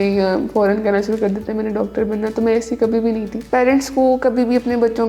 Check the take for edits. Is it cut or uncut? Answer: cut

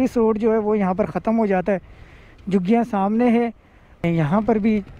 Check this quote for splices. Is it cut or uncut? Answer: cut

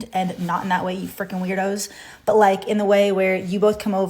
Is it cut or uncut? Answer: cut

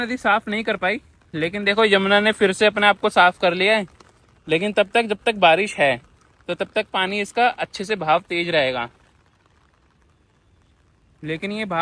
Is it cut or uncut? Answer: uncut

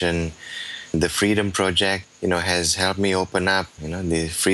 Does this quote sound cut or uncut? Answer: cut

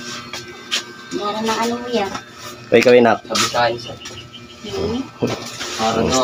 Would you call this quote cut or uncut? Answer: uncut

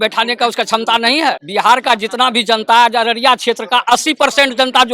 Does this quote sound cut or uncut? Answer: cut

